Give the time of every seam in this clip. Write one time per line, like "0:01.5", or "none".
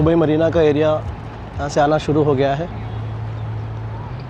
none